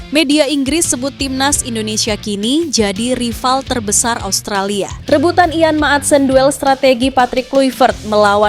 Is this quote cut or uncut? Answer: cut